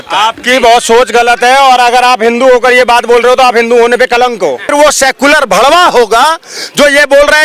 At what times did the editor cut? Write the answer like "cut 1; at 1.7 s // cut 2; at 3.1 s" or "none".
cut 1; at 4.7 s